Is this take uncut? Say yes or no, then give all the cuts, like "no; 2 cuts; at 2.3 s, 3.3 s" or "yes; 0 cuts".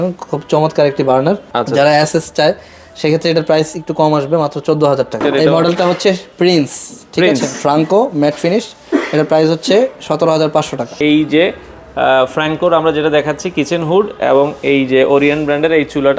no; 3 cuts; at 1.5 s, 5.2 s, 10.9 s